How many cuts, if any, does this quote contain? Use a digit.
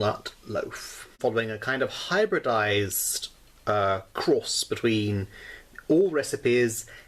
1